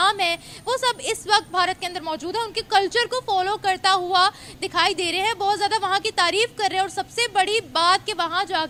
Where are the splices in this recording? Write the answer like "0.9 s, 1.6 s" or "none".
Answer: none